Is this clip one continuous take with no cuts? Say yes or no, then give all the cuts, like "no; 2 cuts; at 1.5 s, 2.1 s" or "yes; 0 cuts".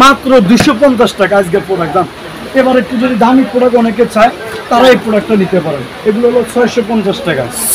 no; 1 cut; at 2.2 s